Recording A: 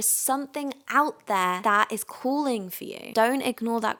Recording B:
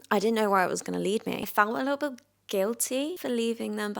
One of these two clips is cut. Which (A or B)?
B